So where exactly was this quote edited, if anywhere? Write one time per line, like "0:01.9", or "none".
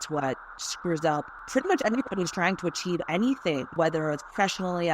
0:01.4
0:03.7

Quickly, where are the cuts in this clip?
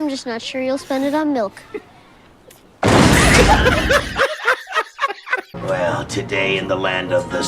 0:05.5

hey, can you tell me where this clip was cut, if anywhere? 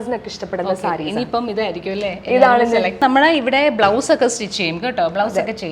0:03.0

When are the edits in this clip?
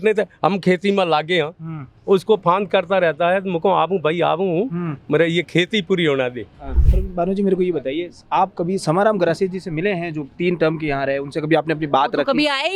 0:06.8

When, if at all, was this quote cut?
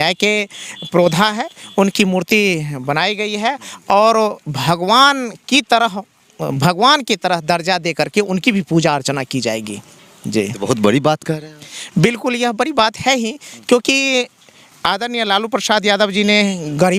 none

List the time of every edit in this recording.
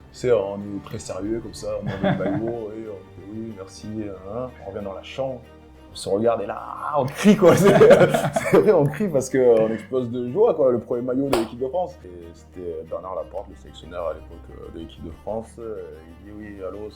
0:12.1

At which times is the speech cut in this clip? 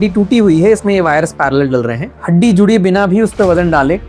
0:02.1

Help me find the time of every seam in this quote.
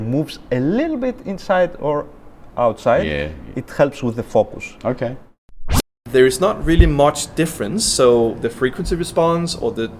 0:05.4

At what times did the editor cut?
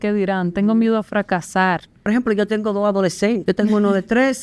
0:02.1
0:03.4

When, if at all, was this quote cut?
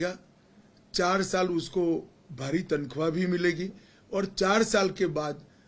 none

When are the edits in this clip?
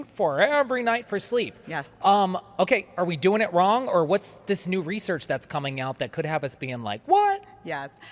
none

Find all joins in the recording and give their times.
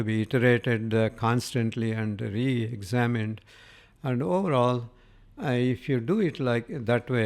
none

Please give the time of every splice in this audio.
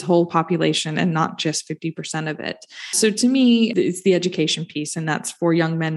0:03.0
0:03.7

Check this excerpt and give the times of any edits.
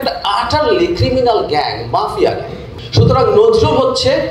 0:02.6

